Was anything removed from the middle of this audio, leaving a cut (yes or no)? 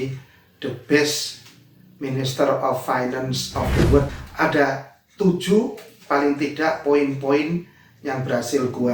yes